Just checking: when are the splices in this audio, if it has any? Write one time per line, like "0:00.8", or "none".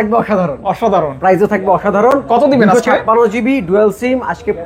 none